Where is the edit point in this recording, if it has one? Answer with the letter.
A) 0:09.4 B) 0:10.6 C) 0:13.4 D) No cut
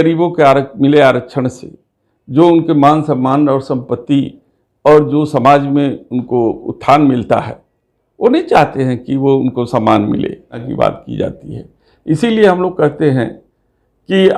B